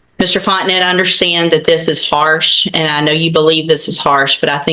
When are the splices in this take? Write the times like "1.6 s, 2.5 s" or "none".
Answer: none